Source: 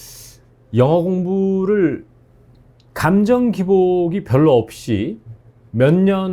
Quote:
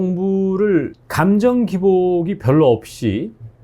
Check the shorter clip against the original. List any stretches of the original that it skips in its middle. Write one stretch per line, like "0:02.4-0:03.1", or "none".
0:02.1-0:02.9